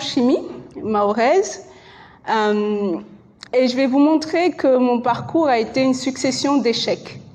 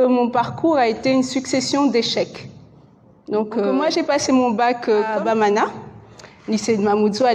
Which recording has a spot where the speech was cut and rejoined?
second; 2 cuts; at 3.7 s, 5.1 s

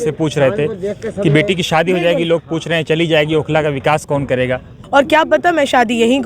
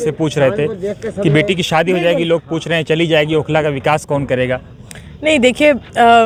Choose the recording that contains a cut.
first; 1 cut; at 4.8 s

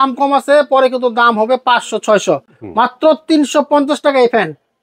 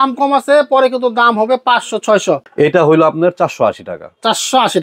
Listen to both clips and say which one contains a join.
second; 1 cut; at 2.5 s

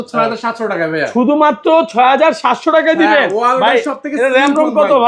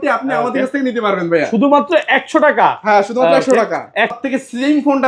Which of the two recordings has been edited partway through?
second; 1 cut; at 4.1 s

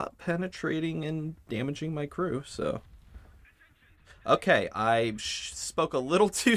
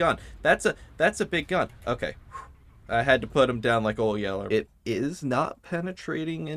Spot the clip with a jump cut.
second; 2 cuts; at 2.7 s, 4.5 s

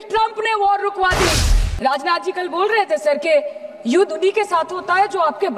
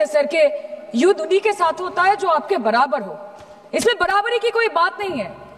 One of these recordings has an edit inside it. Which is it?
first; 1 cut; at 1.4 s

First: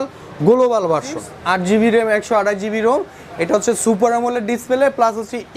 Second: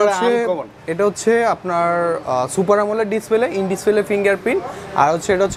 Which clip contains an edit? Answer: first; 1 cut; at 1.3 s

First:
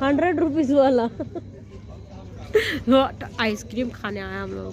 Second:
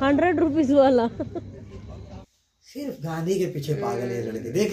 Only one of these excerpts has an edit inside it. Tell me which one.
second; 1 cut; at 2.2 s

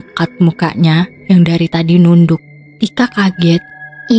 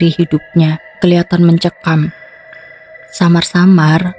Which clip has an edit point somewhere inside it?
second; 1 cut; at 0.9 s

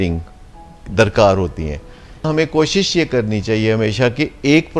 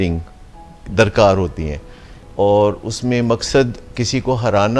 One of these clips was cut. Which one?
first; 1 cut; at 2.3 s

